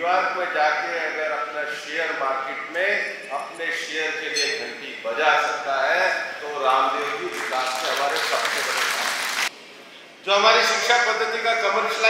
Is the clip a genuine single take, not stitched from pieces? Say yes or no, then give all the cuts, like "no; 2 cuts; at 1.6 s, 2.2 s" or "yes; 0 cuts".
no; 1 cut; at 9.5 s